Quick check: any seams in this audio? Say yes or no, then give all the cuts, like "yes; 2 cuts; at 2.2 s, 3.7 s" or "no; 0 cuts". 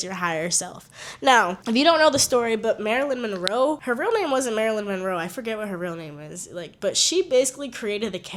no; 0 cuts